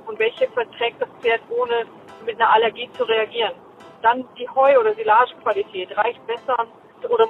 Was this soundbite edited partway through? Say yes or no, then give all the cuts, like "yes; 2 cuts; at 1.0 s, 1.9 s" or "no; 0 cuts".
no; 0 cuts